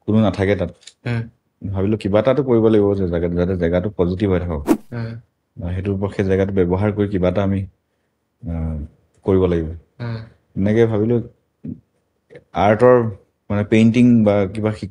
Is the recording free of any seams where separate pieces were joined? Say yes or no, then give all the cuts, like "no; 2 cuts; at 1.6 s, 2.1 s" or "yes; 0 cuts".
yes; 0 cuts